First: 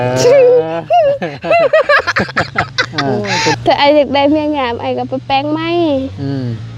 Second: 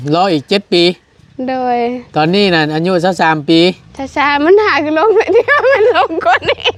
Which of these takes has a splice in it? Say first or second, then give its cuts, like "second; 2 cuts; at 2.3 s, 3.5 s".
first; 1 cut; at 3.5 s